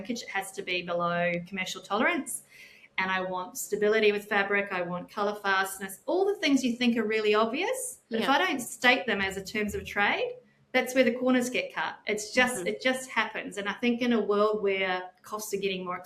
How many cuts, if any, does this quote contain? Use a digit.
2